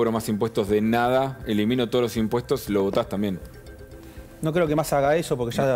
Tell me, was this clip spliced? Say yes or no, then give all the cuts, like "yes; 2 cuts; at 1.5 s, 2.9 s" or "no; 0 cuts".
no; 0 cuts